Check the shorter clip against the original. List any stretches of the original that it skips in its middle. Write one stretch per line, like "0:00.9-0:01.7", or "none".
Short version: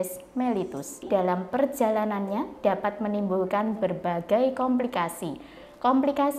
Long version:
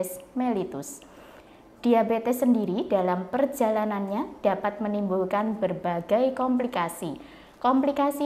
0:01.0-0:02.8